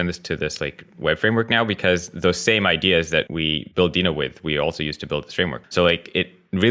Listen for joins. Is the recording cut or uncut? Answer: cut